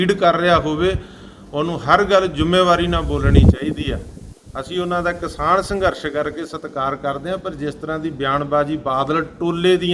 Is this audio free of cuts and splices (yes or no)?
yes